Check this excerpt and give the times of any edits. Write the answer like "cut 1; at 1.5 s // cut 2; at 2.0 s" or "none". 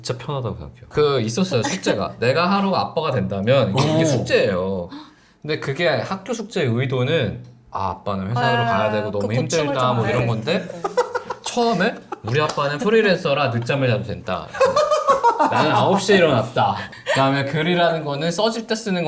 none